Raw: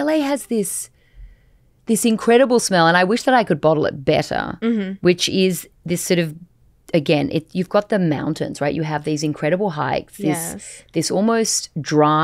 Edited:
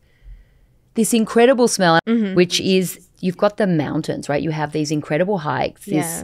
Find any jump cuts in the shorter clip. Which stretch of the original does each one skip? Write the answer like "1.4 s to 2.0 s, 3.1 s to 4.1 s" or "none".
3.0 s to 4.7 s, 5.8 s to 7.5 s